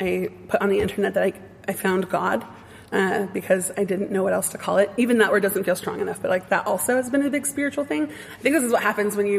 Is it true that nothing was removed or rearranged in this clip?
yes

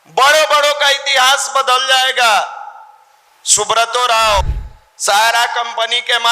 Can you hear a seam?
yes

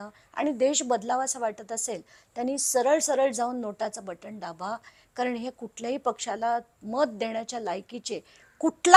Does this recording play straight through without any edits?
yes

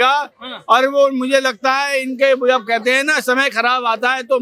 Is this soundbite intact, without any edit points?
yes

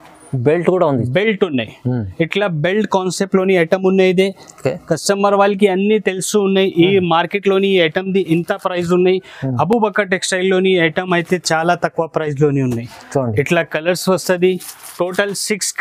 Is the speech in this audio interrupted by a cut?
no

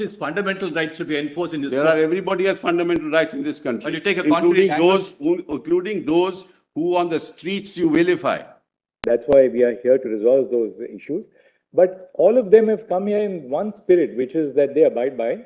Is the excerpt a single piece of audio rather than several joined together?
no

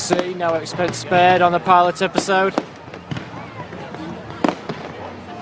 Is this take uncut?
no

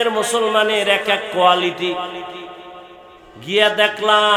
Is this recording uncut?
yes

